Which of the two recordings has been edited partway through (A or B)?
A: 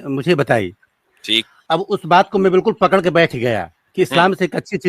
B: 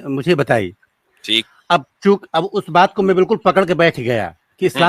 A